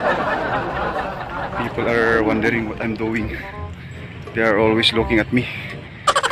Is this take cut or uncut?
uncut